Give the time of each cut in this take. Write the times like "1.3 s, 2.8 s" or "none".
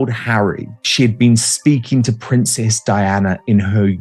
none